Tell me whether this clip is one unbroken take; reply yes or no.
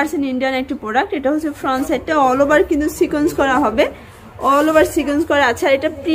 yes